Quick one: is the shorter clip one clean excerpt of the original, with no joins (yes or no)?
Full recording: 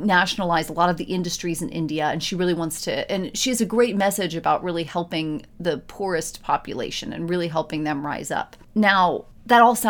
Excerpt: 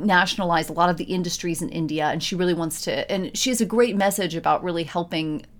yes